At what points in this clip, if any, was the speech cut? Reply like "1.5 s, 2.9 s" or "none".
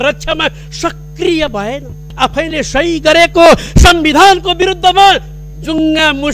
2.1 s